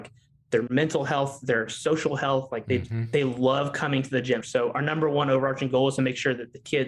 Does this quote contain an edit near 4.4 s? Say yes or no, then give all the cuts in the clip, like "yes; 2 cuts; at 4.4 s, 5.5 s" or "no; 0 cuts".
yes; 1 cut; at 4.4 s